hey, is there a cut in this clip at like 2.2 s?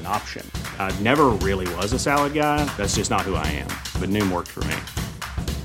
no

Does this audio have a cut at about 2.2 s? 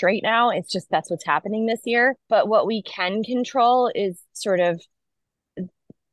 yes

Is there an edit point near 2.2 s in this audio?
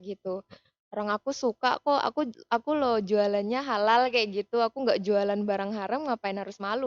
no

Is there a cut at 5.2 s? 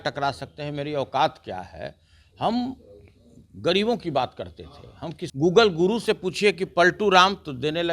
yes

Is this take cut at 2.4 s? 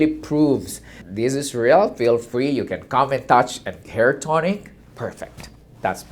no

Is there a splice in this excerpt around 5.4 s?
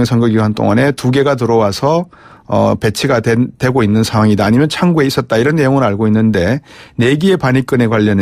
no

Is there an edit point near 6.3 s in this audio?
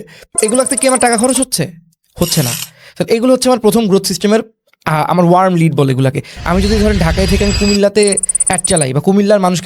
yes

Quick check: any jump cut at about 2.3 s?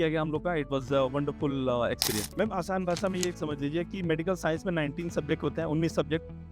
yes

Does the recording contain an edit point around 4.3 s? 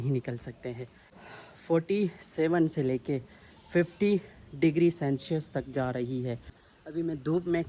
no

